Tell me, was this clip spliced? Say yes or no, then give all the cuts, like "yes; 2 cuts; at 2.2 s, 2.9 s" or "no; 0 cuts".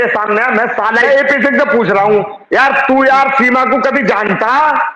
yes; 1 cut; at 1.1 s